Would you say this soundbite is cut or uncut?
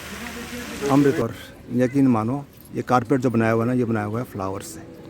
cut